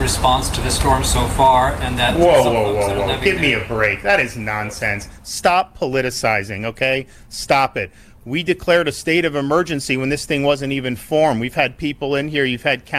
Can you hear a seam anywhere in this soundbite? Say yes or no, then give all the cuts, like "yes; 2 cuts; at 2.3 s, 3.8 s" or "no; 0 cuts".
no; 0 cuts